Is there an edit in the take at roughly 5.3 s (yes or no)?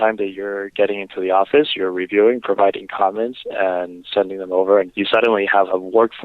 yes